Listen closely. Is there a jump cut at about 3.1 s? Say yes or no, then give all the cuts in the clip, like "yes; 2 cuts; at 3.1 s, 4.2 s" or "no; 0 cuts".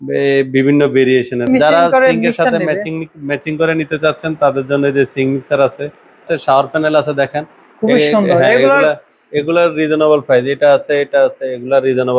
no; 2 cuts; at 1.5 s, 6.3 s